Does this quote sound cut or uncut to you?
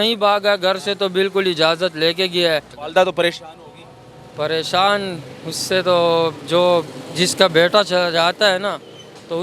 cut